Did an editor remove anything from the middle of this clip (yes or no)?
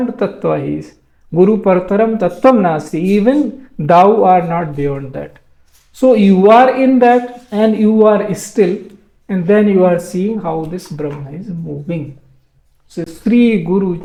no